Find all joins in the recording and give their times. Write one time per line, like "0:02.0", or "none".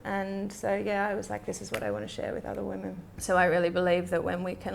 0:03.1